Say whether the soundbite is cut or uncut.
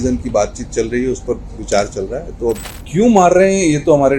cut